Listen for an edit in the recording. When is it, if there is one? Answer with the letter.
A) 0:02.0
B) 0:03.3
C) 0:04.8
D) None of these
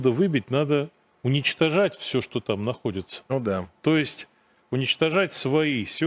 B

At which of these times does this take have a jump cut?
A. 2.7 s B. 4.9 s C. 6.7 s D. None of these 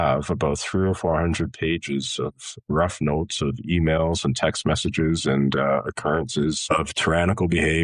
C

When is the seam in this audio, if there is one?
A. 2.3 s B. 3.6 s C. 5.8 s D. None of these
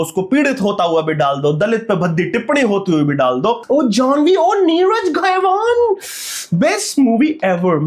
B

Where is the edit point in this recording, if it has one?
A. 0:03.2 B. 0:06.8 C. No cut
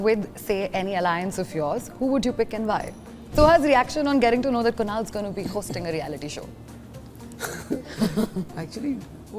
A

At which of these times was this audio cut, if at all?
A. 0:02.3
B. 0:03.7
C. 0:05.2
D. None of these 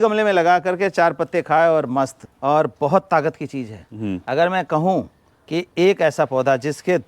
A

